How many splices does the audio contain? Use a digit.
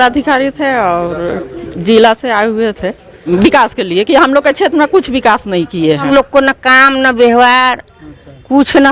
2